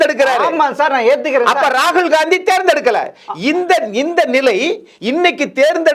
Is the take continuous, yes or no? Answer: yes